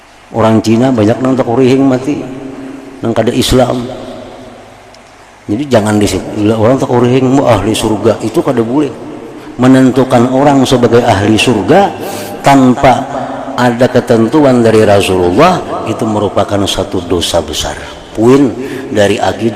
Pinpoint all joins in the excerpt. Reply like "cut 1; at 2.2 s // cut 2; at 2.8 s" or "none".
cut 1; at 18.1 s